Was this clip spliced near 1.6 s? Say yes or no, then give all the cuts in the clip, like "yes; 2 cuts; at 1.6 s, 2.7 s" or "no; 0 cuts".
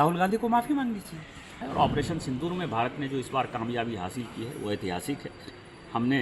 yes; 1 cut; at 1.6 s